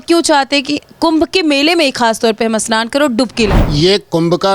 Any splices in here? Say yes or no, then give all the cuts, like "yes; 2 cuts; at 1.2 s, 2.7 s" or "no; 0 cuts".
yes; 1 cut; at 3.6 s